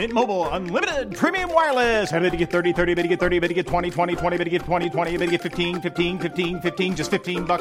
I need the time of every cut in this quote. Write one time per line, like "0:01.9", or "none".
none

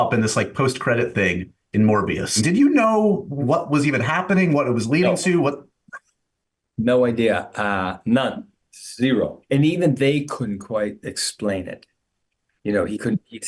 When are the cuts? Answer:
0:02.4
0:03.4
0:09.4

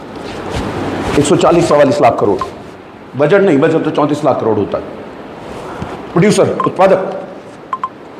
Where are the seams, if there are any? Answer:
0:05.9

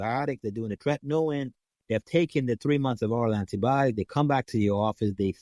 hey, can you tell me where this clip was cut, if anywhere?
none

